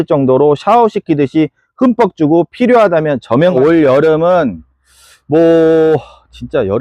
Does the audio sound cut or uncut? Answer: cut